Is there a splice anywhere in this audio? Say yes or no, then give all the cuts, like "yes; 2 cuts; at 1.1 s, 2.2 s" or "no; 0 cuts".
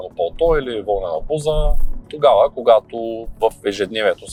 no; 0 cuts